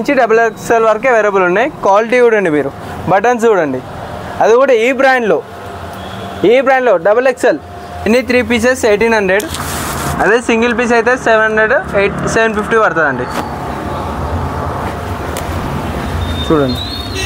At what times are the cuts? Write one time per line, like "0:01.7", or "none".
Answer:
0:08.1